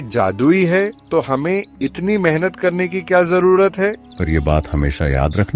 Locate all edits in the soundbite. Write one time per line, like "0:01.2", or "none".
0:01.0
0:04.1

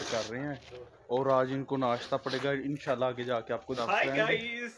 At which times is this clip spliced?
0:03.8

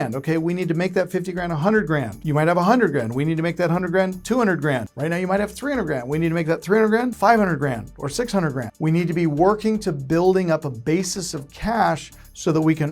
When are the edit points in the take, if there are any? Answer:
0:02.2
0:04.9
0:07.1
0:08.7

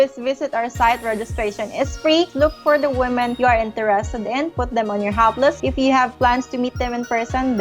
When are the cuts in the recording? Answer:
0:02.3
0:03.3
0:05.6

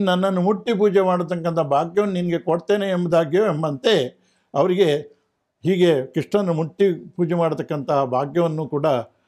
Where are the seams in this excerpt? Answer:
none

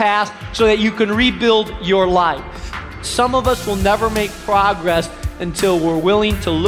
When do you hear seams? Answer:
0:03.1

